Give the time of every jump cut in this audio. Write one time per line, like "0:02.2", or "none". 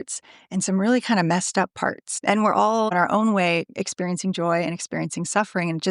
0:02.1
0:02.9